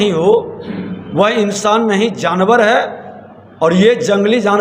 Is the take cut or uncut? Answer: uncut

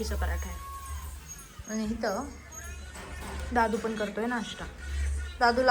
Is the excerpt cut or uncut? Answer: uncut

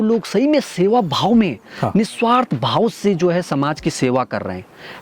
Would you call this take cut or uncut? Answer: uncut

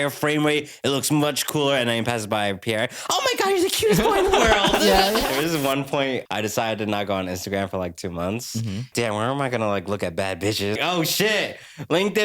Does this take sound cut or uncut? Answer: cut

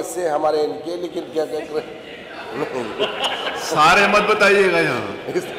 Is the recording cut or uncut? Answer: uncut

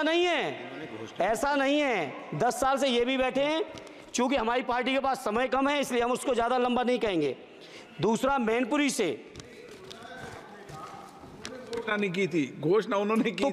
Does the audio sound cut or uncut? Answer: uncut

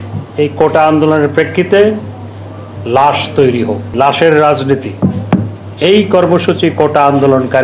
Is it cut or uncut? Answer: cut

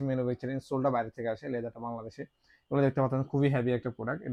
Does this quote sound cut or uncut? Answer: uncut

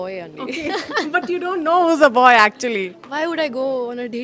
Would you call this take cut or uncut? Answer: uncut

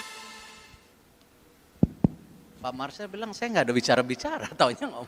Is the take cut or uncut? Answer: uncut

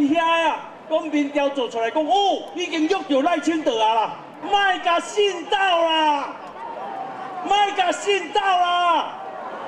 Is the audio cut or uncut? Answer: cut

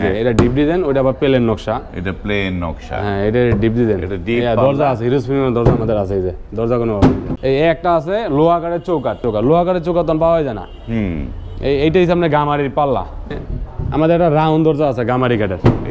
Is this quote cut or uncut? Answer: cut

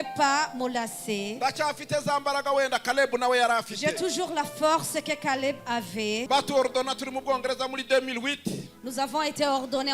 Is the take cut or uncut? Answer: cut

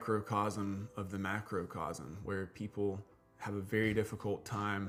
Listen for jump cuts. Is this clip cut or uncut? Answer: uncut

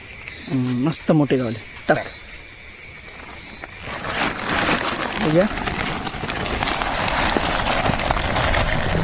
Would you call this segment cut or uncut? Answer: uncut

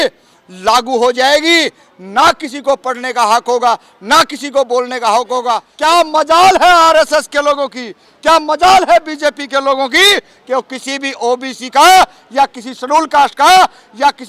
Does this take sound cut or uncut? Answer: cut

